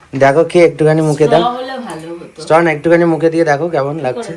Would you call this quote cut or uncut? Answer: uncut